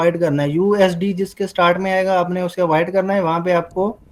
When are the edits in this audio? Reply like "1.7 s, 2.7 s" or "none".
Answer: none